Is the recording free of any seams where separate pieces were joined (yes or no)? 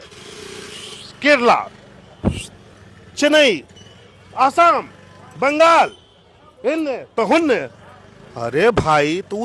yes